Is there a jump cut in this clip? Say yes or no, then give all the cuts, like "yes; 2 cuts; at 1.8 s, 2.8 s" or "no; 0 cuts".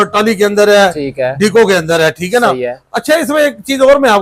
no; 0 cuts